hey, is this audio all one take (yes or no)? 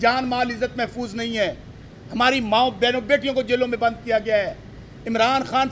yes